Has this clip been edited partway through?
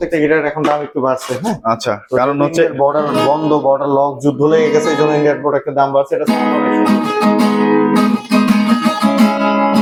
no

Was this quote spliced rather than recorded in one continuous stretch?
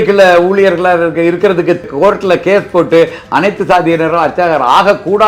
no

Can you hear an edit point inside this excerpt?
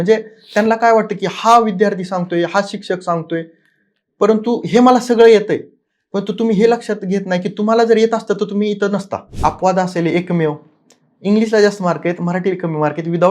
yes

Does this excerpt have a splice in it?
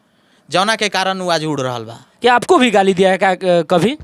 yes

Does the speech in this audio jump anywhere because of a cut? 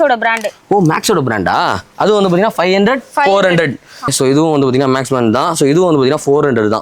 yes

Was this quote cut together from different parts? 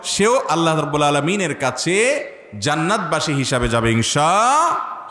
no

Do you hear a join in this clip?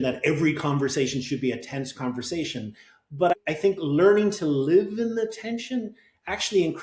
yes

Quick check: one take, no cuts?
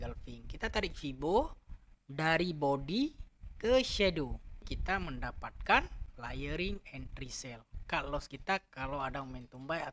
no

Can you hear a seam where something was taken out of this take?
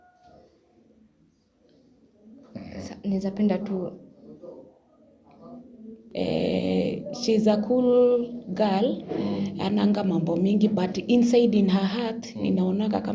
yes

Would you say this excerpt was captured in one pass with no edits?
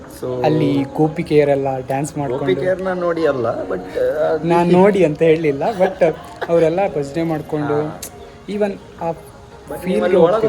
no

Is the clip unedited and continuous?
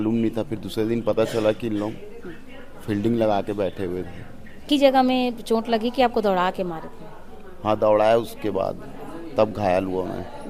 no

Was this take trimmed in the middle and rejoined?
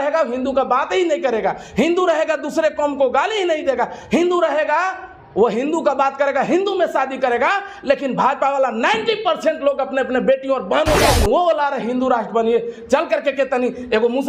yes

